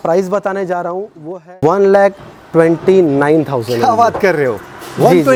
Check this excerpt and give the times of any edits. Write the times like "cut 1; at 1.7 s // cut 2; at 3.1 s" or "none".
none